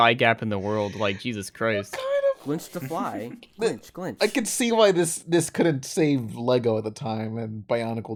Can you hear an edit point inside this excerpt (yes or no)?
no